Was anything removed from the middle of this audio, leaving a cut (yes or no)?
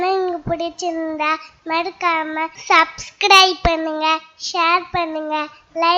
yes